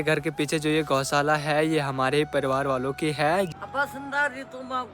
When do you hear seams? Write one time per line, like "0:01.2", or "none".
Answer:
0:03.5